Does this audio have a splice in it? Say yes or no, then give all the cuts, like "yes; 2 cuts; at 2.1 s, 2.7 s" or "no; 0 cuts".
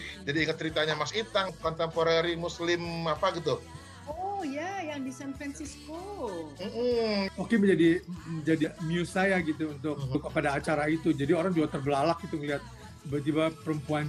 yes; 4 cuts; at 1.5 s, 7.3 s, 8.6 s, 10.1 s